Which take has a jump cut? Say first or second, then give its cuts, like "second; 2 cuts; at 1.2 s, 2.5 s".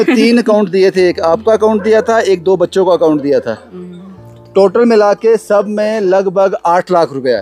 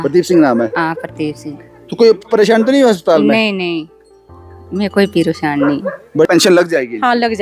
second; 1 cut; at 6.3 s